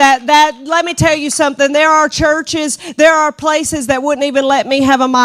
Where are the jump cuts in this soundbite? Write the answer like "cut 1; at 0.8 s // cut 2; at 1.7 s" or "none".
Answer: none